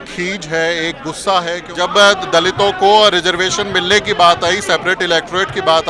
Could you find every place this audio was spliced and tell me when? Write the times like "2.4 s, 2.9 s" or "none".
1.6 s